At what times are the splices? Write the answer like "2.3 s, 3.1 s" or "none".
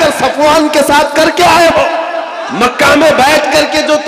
2.4 s

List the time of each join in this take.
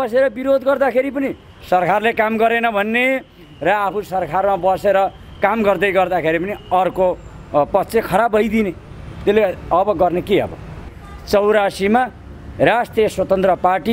10.9 s

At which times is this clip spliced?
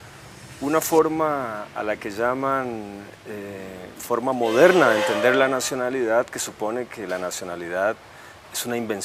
none

